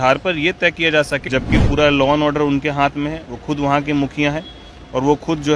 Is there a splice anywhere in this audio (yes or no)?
yes